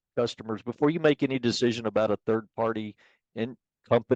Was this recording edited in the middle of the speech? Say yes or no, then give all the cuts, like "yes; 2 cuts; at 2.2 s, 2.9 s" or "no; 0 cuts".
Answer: no; 0 cuts